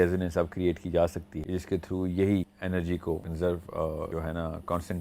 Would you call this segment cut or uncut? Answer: cut